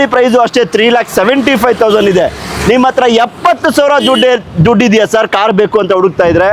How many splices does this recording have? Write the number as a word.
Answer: zero